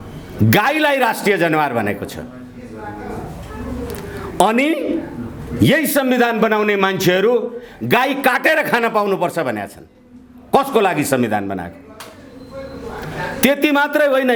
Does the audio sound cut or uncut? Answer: uncut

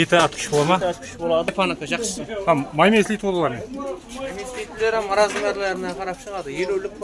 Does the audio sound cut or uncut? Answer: cut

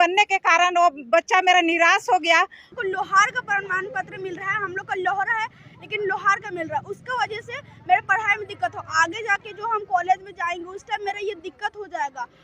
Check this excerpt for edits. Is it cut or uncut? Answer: cut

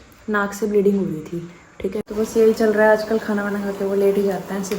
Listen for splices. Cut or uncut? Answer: cut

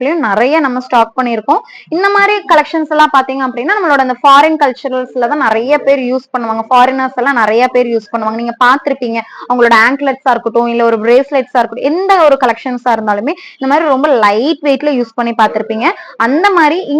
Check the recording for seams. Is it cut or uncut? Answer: uncut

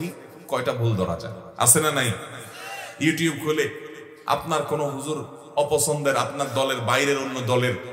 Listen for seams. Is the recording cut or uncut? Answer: cut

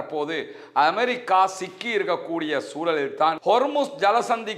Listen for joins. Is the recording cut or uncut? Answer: cut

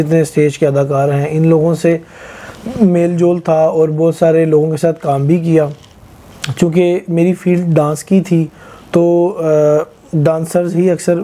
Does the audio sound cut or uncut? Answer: uncut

